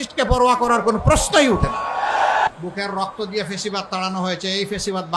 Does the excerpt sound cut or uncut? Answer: cut